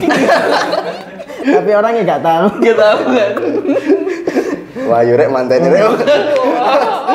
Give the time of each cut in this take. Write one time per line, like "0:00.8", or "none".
none